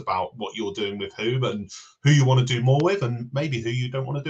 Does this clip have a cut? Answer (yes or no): no